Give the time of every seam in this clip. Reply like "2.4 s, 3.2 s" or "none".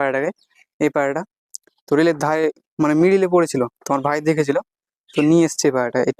none